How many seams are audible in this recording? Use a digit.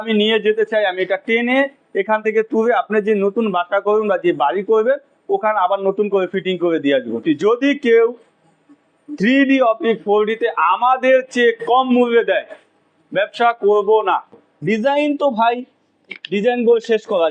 2